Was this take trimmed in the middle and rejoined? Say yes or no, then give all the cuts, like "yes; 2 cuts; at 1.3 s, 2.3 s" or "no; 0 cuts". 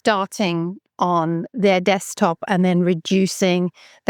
no; 0 cuts